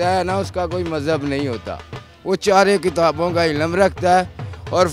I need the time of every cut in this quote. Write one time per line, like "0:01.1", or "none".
none